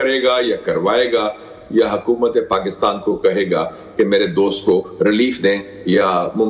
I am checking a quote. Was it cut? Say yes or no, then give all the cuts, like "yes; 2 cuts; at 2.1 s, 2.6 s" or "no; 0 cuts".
no; 0 cuts